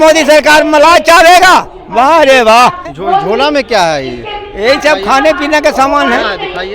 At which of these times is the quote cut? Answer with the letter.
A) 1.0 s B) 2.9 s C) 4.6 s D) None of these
B